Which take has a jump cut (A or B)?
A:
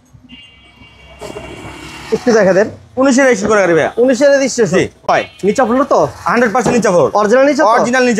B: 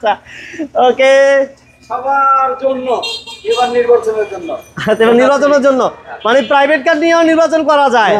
A